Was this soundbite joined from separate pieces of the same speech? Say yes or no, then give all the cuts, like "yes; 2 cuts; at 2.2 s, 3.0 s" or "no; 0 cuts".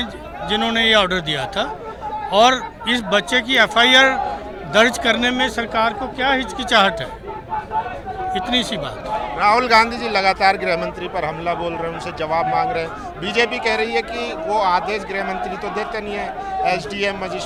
no; 0 cuts